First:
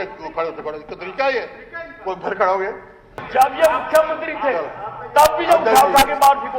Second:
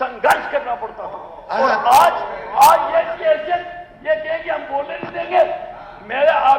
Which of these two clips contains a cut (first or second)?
first